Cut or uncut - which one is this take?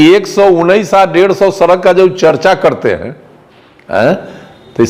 uncut